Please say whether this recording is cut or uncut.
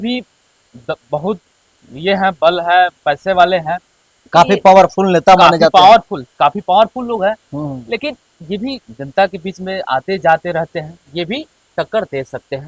uncut